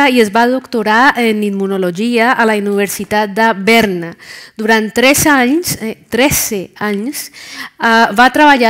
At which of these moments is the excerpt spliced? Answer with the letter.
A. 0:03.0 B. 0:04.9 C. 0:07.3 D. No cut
B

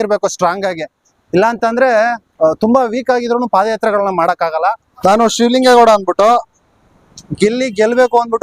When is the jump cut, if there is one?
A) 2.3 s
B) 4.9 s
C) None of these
B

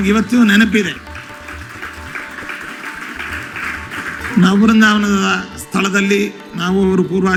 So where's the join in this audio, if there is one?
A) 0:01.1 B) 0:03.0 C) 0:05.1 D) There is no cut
D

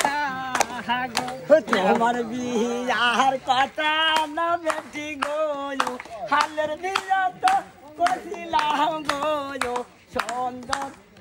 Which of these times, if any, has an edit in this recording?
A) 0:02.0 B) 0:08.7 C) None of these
C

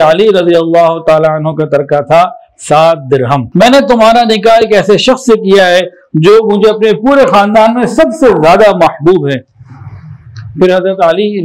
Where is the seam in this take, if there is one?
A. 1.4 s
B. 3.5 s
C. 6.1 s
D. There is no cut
B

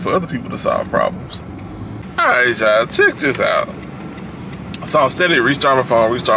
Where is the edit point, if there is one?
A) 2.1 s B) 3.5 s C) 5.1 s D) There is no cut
A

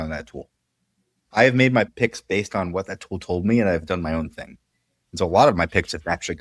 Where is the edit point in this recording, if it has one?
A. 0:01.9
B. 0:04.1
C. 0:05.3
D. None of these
A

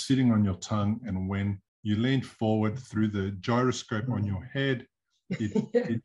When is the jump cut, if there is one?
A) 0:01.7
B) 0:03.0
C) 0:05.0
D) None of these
A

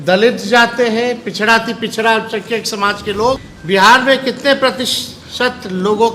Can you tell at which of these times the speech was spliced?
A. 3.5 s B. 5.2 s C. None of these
A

